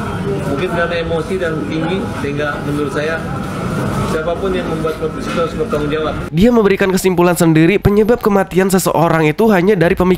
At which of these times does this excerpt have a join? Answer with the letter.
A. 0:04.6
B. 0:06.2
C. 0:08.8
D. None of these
B